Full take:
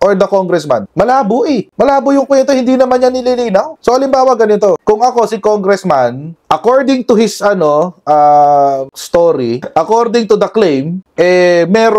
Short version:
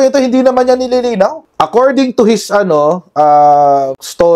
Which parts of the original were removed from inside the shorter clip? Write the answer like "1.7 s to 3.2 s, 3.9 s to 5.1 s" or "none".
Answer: 3.7 s to 6.3 s